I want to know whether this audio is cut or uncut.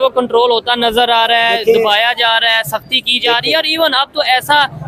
uncut